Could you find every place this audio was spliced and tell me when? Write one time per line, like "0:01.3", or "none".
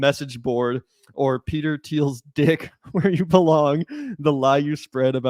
none